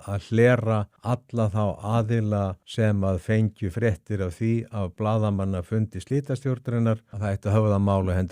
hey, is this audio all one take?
no; 3 cuts; at 0.9 s, 2.6 s, 7.1 s

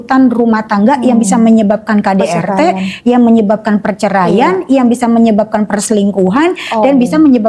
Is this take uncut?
yes; 0 cuts

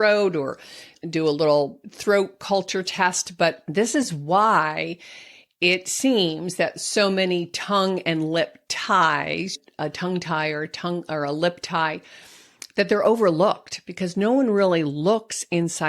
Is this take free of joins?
no; 3 cuts; at 1.8 s, 3.6 s, 9.5 s

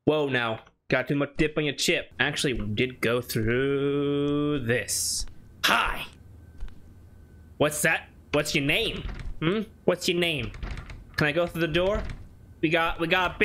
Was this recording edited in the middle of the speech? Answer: yes; 1 cut; at 2.1 s

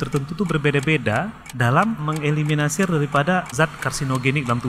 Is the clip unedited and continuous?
no; 2 cuts; at 2.0 s, 3.5 s

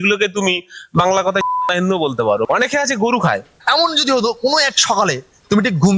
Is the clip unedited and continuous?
no; 2 cuts; at 2.4 s, 3.5 s

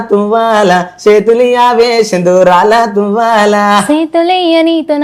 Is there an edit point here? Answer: no; 0 cuts

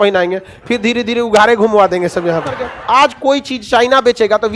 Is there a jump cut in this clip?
yes; 1 cut; at 2.7 s

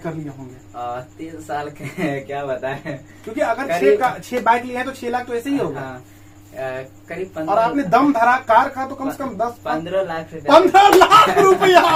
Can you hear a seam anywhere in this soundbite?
no; 0 cuts

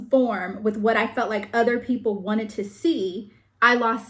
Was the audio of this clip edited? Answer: no; 0 cuts

